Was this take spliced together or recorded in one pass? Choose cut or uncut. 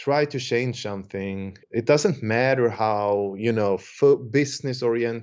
cut